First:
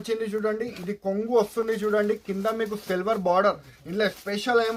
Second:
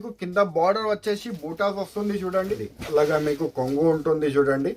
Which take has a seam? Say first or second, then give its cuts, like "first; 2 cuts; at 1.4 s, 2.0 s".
second; 1 cut; at 2.7 s